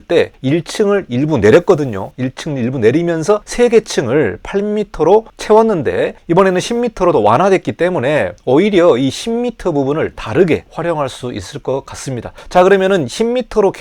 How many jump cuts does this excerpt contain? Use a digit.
1